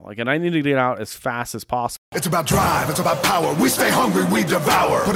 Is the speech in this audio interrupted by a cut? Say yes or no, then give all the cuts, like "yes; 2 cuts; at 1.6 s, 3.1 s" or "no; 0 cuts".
yes; 1 cut; at 2.2 s